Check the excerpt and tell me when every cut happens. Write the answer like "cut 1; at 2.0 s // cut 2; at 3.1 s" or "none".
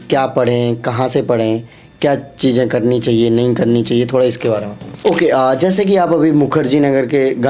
cut 1; at 4.8 s